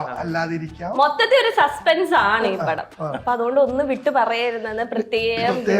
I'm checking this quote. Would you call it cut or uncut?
cut